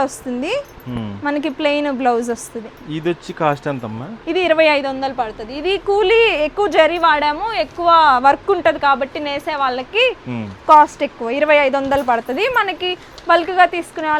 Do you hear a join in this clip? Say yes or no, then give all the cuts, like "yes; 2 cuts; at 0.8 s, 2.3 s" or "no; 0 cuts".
no; 0 cuts